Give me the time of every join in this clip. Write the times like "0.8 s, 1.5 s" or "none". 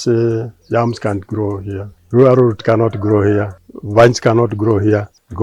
none